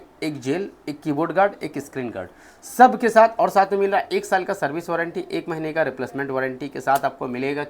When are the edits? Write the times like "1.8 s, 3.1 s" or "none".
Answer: none